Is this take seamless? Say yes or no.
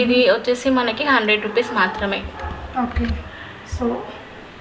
yes